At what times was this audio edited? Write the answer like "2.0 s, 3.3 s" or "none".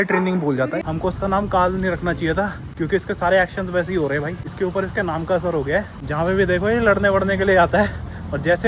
0.8 s, 2.6 s, 4.4 s, 6.0 s